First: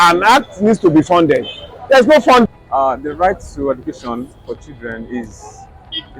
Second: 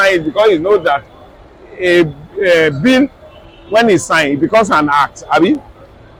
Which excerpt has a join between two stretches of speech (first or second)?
first